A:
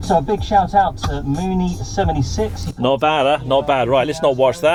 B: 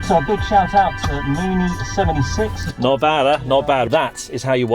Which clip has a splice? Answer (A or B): B